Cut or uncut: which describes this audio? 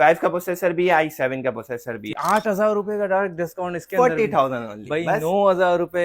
cut